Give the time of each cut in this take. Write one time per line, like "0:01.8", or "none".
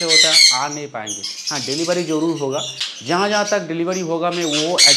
none